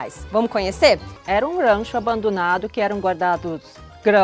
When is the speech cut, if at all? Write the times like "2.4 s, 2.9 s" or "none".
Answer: 1.1 s

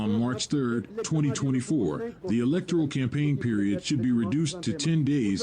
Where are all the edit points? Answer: 2.2 s

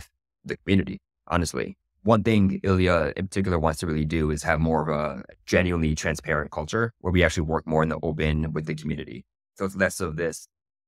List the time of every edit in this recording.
1.8 s

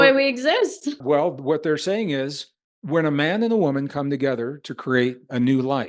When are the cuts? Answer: 1.0 s

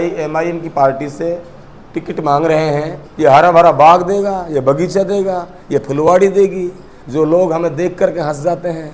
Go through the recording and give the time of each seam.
3.0 s

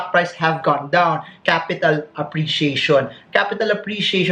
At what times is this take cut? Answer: 1.3 s

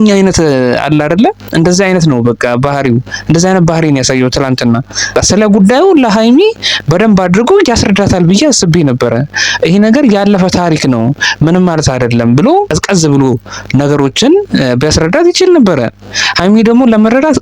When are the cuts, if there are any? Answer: 5.1 s, 12.7 s

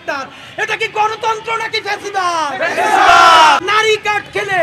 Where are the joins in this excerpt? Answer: 3.6 s

